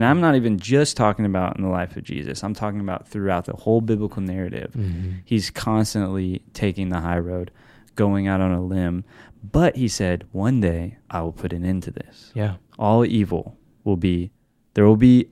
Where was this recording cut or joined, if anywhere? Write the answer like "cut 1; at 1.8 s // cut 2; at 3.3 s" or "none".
cut 1; at 11.0 s